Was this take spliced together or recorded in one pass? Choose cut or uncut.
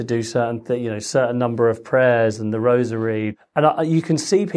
cut